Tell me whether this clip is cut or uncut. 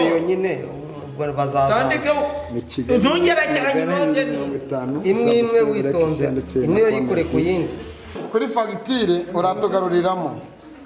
cut